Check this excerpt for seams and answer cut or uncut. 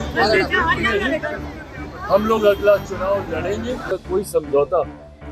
cut